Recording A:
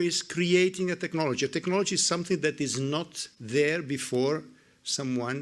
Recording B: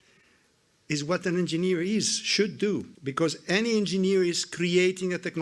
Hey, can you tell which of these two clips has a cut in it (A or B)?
B